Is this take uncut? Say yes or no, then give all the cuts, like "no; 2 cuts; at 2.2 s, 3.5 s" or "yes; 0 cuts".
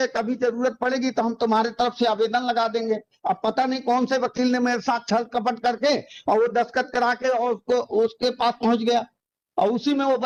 yes; 0 cuts